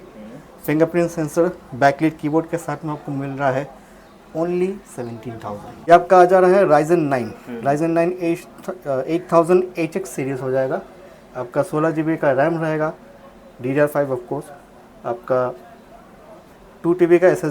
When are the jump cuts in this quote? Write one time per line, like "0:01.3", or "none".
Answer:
0:05.9